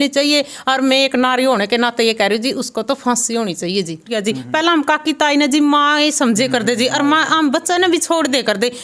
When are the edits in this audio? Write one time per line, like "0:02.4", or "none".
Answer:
0:04.1